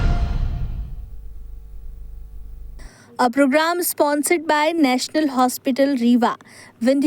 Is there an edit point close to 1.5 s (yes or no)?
no